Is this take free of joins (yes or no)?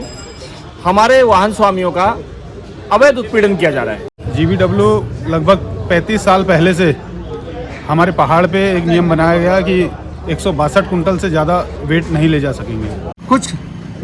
no